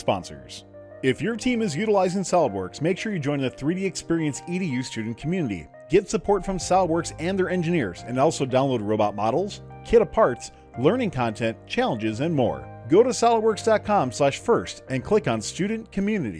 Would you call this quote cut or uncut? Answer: uncut